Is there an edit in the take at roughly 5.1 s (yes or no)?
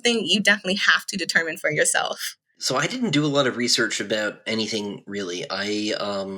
no